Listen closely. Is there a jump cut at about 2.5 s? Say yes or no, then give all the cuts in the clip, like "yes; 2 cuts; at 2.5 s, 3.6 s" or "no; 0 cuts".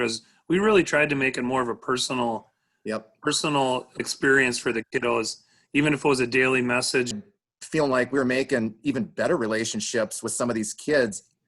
no; 1 cut; at 7.2 s